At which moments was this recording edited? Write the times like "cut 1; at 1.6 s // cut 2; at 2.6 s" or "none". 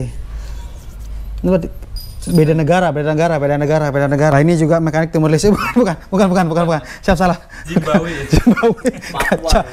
cut 1; at 4.3 s